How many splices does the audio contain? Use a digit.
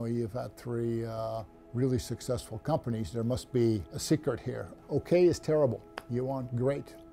2